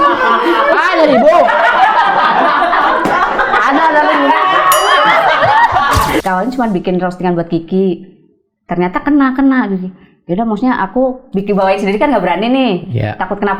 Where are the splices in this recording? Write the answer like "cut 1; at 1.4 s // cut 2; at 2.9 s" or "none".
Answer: cut 1; at 6.2 s